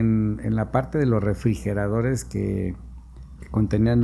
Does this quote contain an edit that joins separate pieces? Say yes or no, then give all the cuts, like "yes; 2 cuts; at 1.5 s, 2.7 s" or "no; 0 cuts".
no; 0 cuts